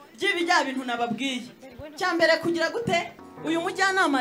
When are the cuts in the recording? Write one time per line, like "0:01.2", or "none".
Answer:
0:03.2